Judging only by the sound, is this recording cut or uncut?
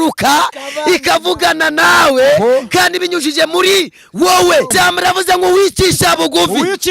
cut